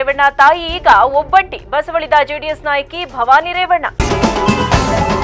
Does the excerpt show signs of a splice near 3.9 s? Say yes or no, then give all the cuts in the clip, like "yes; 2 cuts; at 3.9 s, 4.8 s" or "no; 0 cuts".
yes; 1 cut; at 3.9 s